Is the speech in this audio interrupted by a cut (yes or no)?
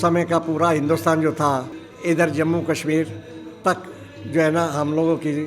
yes